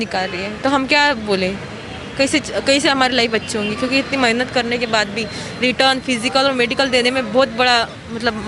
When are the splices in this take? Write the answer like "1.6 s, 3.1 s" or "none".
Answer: none